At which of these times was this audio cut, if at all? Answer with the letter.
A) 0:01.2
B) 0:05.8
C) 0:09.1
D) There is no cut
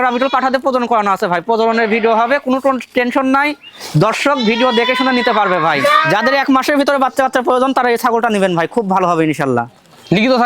B